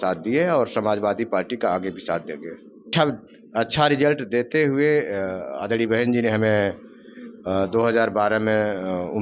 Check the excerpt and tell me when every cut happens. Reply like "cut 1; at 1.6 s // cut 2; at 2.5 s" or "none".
cut 1; at 2.9 s